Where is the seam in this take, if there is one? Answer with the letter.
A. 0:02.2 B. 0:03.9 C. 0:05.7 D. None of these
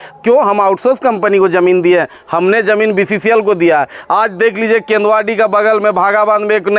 D